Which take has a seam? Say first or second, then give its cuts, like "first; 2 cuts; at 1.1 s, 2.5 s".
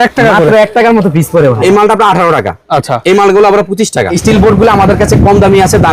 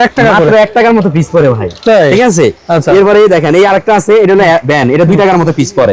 first; 2 cuts; at 1.6 s, 4.1 s